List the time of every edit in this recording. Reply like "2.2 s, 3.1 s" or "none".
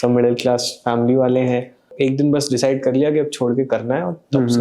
1.9 s